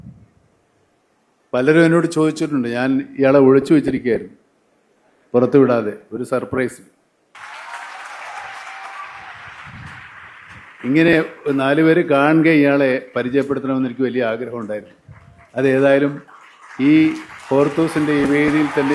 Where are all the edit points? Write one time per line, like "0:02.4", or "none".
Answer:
0:07.3